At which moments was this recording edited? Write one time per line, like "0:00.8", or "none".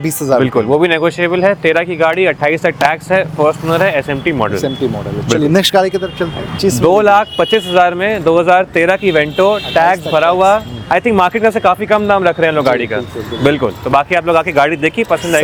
none